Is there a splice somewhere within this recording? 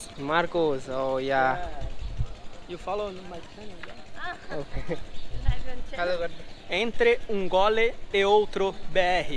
no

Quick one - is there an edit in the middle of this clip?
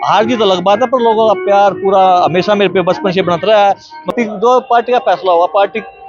yes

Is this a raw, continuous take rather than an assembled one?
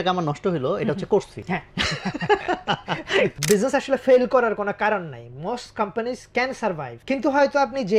no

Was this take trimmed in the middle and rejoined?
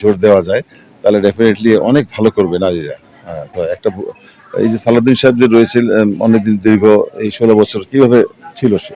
yes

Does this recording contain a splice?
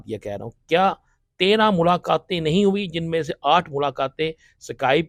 no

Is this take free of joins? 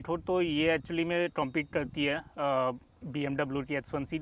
yes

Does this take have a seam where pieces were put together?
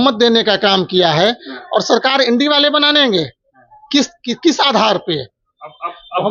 no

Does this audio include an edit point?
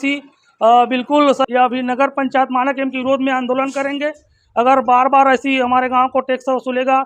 yes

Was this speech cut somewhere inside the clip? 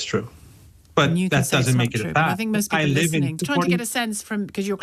yes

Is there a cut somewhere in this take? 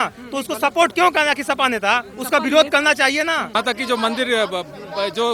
yes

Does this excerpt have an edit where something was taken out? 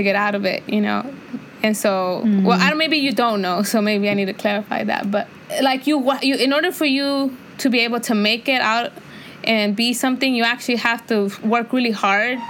no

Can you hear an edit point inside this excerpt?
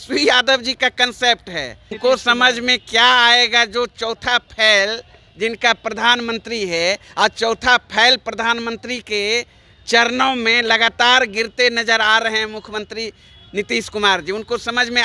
yes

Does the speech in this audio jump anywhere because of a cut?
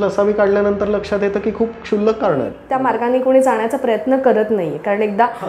yes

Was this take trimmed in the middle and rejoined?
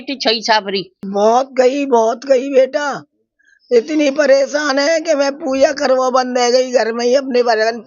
yes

